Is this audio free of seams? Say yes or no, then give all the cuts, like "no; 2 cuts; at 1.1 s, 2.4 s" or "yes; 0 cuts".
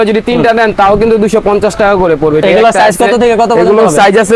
no; 1 cut; at 2.4 s